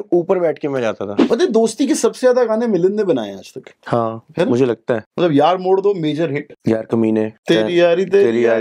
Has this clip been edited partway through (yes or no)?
yes